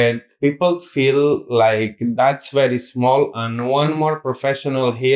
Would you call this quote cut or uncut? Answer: uncut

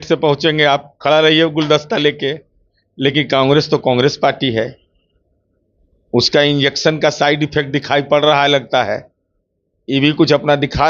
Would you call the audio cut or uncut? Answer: uncut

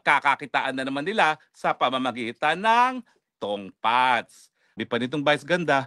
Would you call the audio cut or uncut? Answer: cut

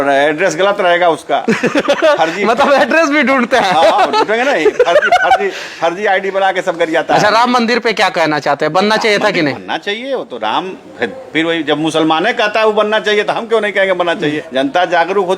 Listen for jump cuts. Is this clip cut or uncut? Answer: cut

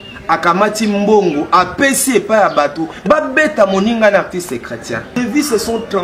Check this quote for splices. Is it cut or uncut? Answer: cut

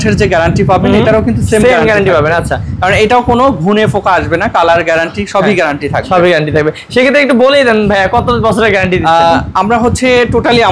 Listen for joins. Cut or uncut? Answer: uncut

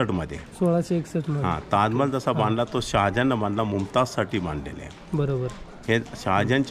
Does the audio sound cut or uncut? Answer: uncut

